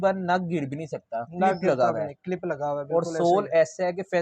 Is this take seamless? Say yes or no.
yes